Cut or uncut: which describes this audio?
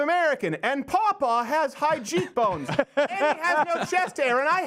uncut